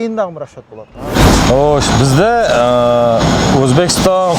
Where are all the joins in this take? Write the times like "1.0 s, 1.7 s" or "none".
1.0 s